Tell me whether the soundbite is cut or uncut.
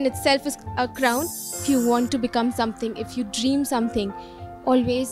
cut